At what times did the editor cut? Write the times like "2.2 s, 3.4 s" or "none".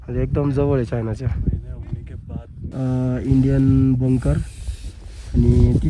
2.6 s